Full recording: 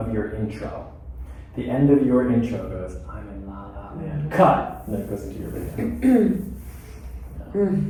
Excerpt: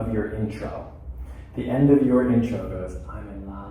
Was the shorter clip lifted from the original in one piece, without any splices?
yes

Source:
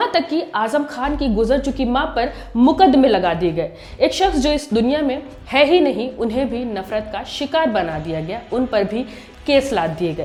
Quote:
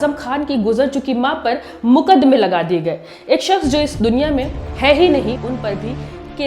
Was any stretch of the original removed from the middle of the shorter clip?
yes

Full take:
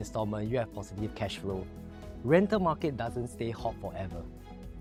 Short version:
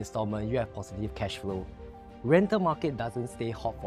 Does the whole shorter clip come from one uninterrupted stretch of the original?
yes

